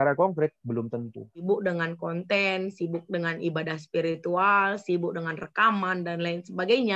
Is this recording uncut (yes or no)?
no